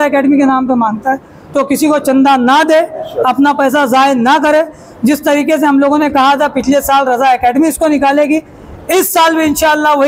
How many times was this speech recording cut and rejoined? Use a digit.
0